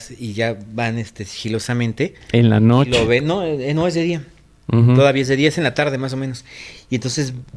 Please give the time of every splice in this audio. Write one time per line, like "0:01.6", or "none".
none